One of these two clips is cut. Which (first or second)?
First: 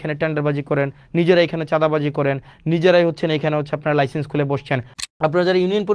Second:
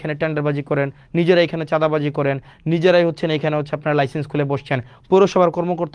first